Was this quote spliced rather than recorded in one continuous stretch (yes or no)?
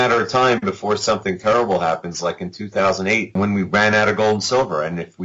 yes